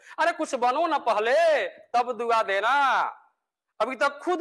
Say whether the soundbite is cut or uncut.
uncut